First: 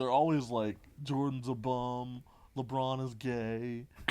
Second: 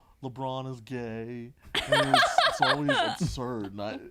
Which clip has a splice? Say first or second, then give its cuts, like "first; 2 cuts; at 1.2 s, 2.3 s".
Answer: first; 1 cut; at 0.9 s